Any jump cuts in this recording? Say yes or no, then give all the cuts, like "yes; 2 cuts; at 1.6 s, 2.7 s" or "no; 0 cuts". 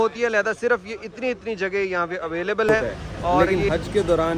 yes; 1 cut; at 3.0 s